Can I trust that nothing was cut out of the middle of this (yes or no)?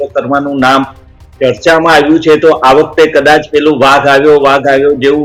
yes